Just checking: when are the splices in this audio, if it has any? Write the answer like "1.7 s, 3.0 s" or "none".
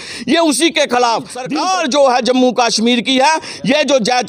1.4 s